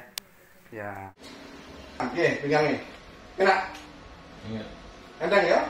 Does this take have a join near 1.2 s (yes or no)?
yes